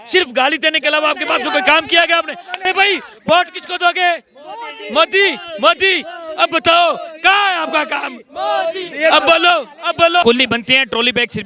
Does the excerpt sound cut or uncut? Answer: cut